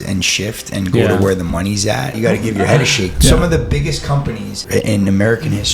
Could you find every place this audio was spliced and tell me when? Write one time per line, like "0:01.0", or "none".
0:02.1
0:03.1
0:04.6

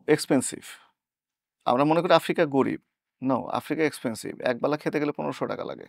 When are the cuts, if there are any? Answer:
none

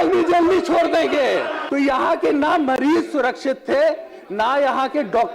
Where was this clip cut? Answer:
0:01.6

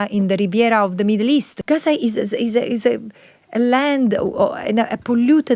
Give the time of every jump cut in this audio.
0:01.5

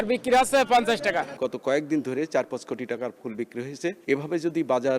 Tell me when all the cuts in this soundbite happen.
0:01.3
0:04.0

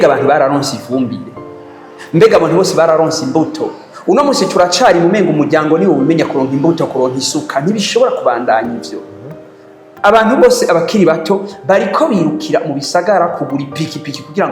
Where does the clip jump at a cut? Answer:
none

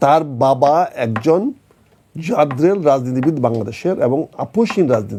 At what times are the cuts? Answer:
none

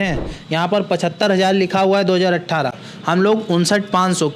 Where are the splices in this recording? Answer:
none

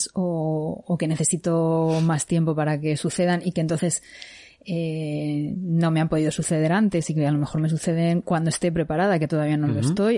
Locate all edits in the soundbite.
none

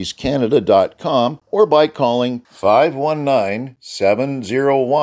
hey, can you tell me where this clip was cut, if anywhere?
0:01.4

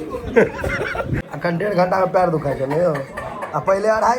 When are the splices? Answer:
0:01.3

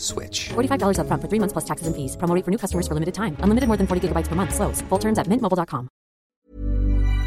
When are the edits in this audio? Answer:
0:06.3

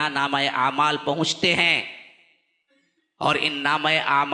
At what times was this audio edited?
none

